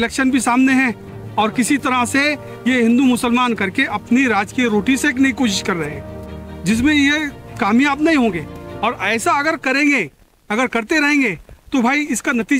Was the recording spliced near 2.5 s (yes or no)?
no